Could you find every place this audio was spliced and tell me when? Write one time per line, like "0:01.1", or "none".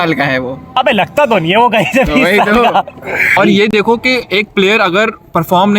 0:03.3